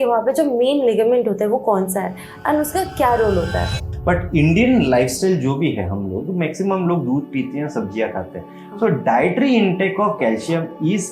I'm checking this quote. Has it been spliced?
yes; 1 cut; at 3.8 s

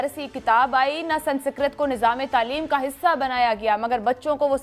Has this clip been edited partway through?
no; 0 cuts

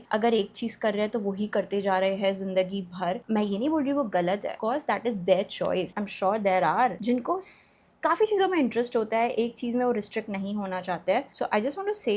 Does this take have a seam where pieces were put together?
no; 0 cuts

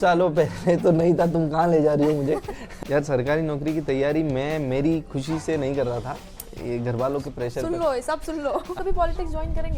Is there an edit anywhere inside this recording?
yes; 2 cuts; at 2.6 s, 8.7 s

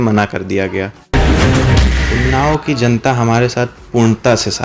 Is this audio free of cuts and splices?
no; 2 cuts; at 1.0 s, 2.0 s

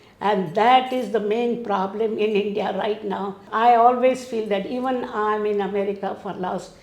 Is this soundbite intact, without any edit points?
no; 1 cut; at 3.4 s

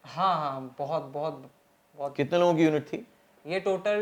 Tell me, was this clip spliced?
no; 0 cuts

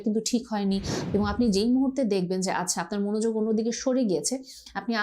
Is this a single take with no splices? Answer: no; 1 cut; at 0.9 s

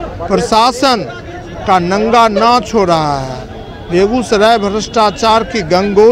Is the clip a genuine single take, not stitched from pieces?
yes; 0 cuts

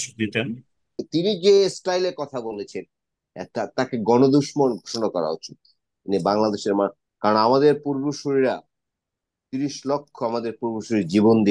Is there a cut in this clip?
yes; 1 cut; at 1.0 s

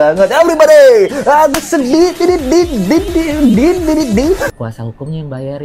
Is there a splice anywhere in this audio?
yes; 1 cut; at 4.5 s

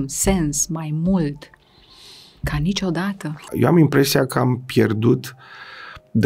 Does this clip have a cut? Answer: yes; 1 cut; at 3.4 s

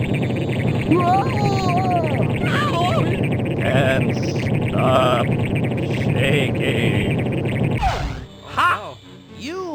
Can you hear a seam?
no; 0 cuts

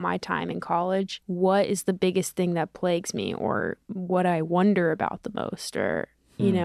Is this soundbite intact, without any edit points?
no; 2 cuts; at 1.2 s, 3.9 s

